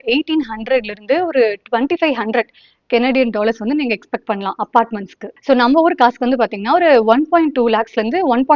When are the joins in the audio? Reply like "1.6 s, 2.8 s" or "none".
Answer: none